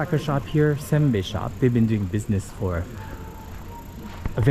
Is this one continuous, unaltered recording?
yes; 0 cuts

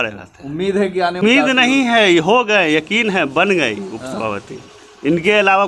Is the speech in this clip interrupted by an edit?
yes; 1 cut; at 1.2 s

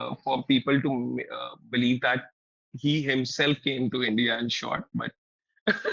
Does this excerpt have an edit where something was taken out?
no; 0 cuts

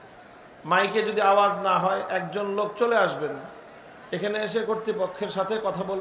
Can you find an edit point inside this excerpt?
no; 0 cuts

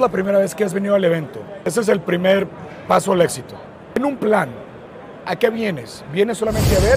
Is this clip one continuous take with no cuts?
no; 2 cuts; at 1.7 s, 4.0 s

